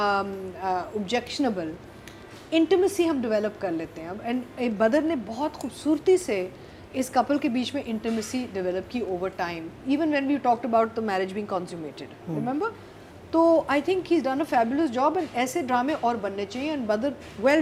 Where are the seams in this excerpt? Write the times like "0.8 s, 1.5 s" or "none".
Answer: none